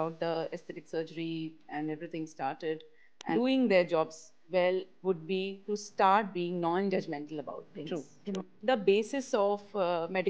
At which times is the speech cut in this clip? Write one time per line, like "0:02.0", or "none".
0:03.4
0:08.5